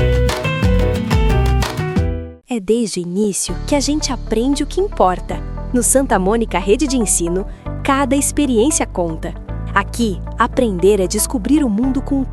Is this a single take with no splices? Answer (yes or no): no